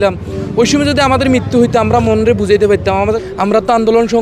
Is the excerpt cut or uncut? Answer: cut